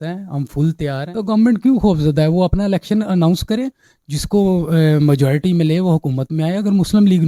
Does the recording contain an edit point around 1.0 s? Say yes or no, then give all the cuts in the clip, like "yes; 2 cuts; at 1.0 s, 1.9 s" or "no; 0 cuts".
yes; 1 cut; at 1.0 s